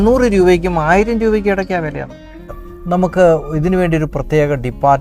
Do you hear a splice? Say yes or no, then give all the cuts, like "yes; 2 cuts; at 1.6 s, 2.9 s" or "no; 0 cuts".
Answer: yes; 1 cut; at 2.4 s